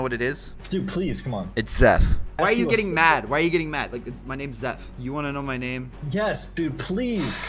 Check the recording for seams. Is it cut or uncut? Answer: cut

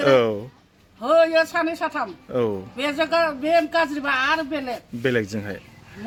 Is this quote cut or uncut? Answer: uncut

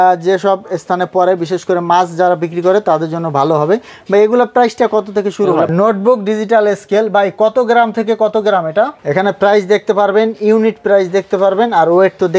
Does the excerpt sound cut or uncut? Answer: cut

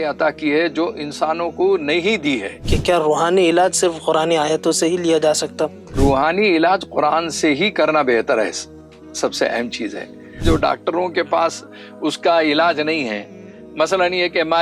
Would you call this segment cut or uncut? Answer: cut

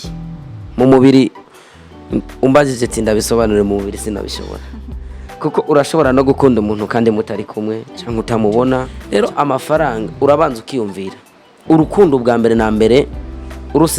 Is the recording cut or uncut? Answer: cut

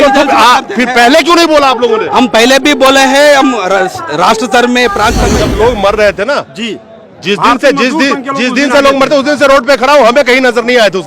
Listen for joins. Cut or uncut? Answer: cut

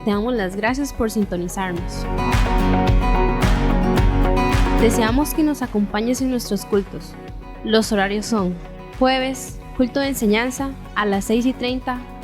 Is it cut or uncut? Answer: cut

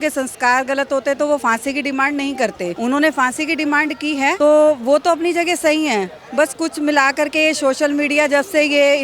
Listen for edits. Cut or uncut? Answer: cut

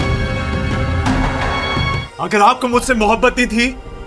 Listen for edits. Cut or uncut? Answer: cut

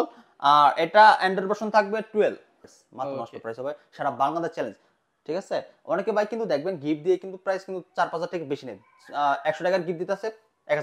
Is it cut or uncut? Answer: cut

